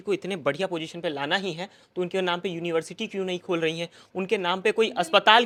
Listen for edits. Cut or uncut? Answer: uncut